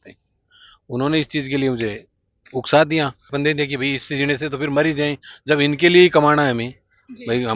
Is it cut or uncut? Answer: cut